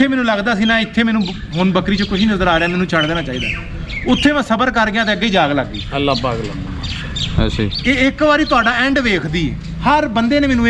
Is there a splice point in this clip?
no; 0 cuts

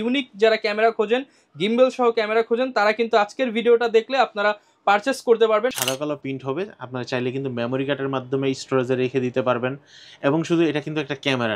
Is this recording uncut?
no; 1 cut; at 5.7 s

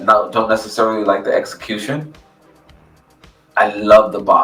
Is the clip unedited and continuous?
yes; 0 cuts

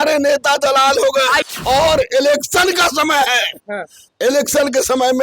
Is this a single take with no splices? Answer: no; 1 cut; at 1.5 s

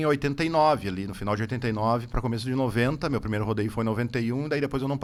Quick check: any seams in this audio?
no; 0 cuts

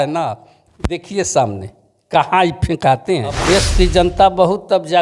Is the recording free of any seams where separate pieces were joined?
no; 1 cut; at 3.4 s

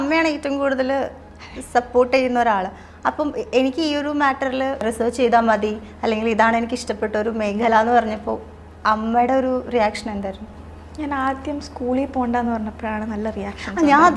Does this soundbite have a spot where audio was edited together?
yes; 1 cut; at 4.8 s

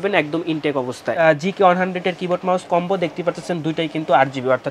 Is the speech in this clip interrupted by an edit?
yes; 1 cut; at 1.1 s

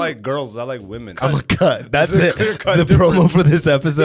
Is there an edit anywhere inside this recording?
yes; 1 cut; at 1.1 s

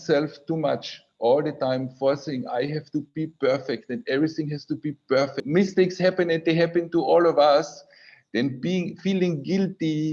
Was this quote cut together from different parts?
yes; 1 cut; at 5.4 s

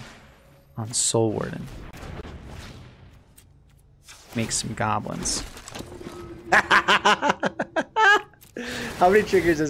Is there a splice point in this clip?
no; 0 cuts

